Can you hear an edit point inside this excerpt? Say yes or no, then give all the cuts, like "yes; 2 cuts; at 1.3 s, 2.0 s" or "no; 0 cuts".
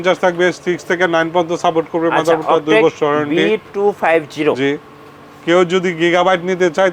no; 0 cuts